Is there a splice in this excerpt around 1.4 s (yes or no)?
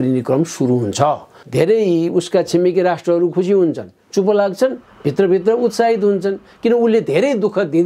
yes